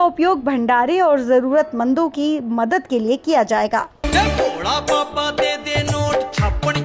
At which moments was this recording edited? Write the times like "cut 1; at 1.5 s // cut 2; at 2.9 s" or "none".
cut 1; at 4.0 s